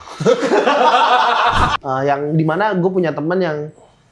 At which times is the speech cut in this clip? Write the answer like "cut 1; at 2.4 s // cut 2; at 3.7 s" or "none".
cut 1; at 1.8 s

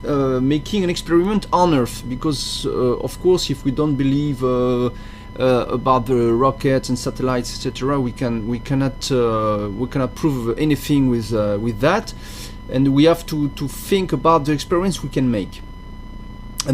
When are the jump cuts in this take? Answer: cut 1; at 9.0 s

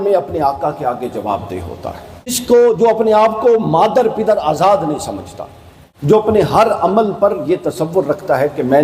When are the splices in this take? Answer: cut 1; at 2.4 s // cut 2; at 6.1 s

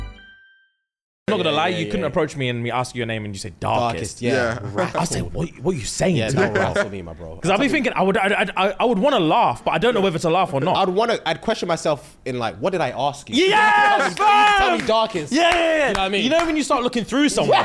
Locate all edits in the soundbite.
cut 1; at 1.3 s

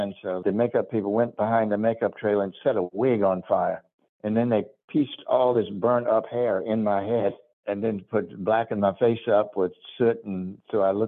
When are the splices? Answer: none

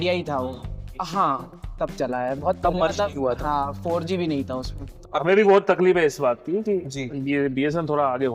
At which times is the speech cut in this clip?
cut 1; at 4.9 s

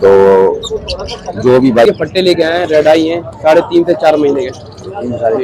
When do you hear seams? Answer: cut 1; at 1.9 s

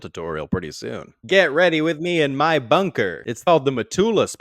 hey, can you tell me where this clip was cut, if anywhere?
cut 1; at 3.4 s

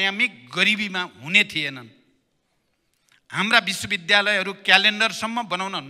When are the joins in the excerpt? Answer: none

